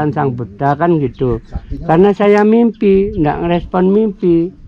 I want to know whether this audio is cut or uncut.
uncut